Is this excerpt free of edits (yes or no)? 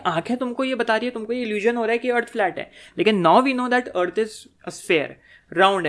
yes